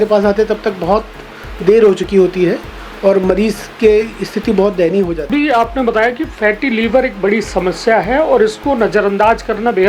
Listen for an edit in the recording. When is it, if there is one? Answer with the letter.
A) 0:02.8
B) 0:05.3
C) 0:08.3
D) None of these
B